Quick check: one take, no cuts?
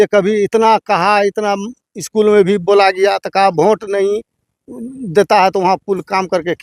yes; 0 cuts

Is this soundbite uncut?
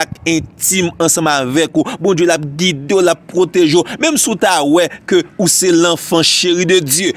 yes; 0 cuts

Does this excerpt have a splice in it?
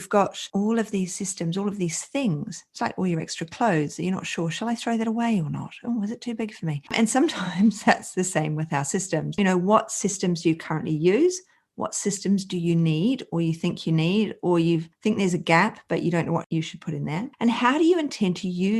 yes; 3 cuts; at 6.9 s, 9.3 s, 16.5 s

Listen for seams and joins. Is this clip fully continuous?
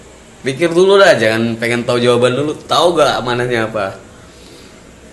yes; 0 cuts

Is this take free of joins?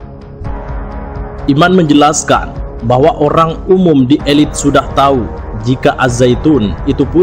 no; 1 cut; at 1.5 s

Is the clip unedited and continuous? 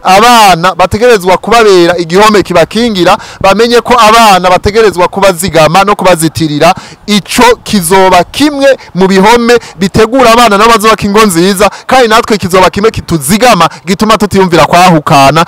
yes; 0 cuts

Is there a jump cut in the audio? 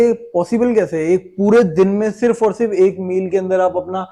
no; 0 cuts

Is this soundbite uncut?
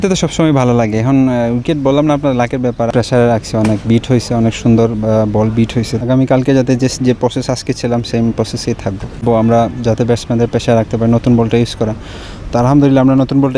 no; 3 cuts; at 2.9 s, 5.9 s, 9.1 s

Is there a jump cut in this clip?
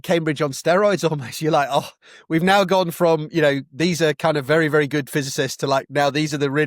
no; 0 cuts

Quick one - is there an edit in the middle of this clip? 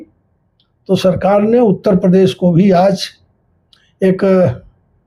no; 0 cuts

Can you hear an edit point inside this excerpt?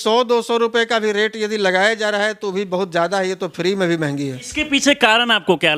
yes; 1 cut; at 4.5 s

